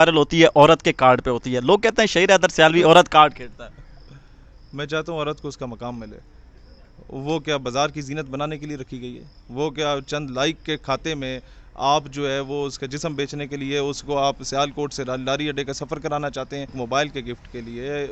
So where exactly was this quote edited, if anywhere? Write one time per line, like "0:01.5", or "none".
0:16.8